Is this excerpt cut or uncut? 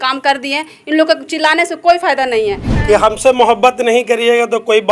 cut